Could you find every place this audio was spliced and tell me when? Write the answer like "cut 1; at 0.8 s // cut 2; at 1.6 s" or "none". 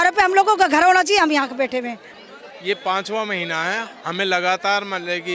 cut 1; at 2.0 s